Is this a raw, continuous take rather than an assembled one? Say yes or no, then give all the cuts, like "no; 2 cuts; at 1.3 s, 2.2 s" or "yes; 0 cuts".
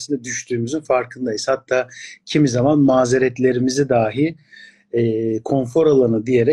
yes; 0 cuts